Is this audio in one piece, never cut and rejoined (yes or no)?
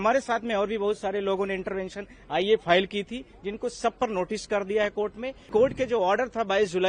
no